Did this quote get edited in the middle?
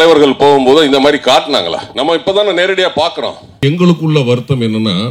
yes; 2 cuts; at 1.8 s, 3.6 s

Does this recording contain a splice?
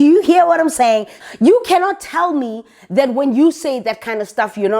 yes; 1 cut; at 1.1 s

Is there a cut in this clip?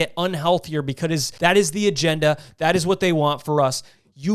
yes; 1 cut; at 1.3 s

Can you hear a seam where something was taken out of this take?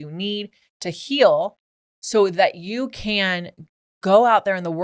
no; 0 cuts

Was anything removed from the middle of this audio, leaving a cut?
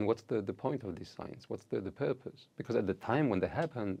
no; 0 cuts

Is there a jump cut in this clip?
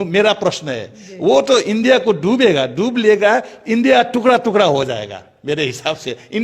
no; 0 cuts

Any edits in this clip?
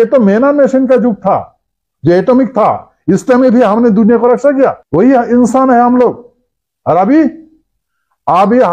yes; 1 cut; at 4.8 s

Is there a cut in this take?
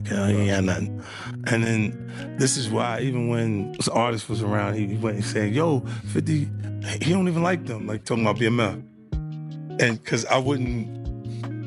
no; 0 cuts

